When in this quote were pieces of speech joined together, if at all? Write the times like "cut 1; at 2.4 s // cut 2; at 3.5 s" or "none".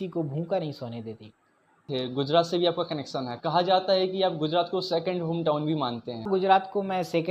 cut 1; at 1.9 s // cut 2; at 6.3 s